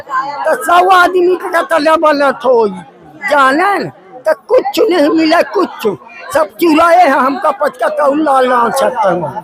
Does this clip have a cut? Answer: no; 0 cuts

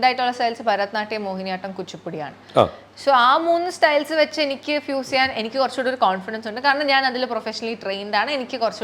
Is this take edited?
no; 0 cuts

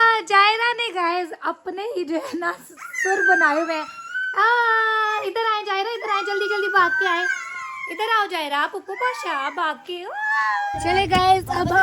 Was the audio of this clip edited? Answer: yes; 1 cut; at 10.8 s

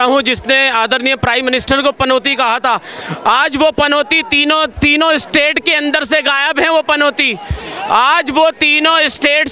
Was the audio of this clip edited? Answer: no; 0 cuts

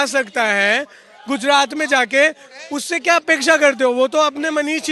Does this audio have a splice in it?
no; 0 cuts

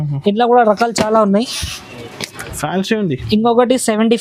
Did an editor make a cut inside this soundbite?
no; 0 cuts

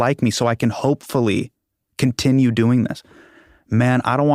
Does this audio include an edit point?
no; 0 cuts

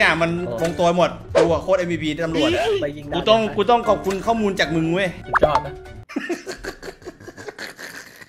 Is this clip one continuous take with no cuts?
yes; 0 cuts

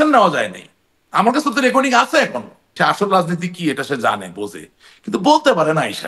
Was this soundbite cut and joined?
yes; 1 cut; at 2.7 s

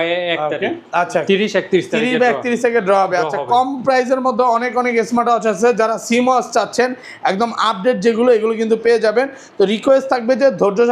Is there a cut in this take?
no; 0 cuts

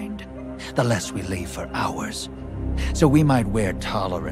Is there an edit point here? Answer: yes; 1 cut; at 2.4 s

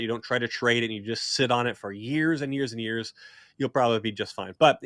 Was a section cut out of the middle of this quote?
no; 0 cuts

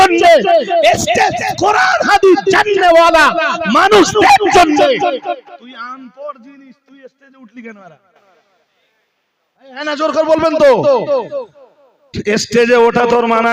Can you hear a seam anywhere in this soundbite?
no; 0 cuts

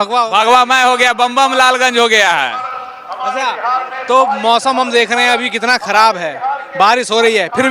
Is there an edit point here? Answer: no; 0 cuts

